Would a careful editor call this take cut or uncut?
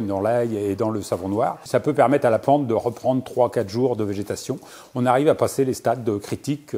cut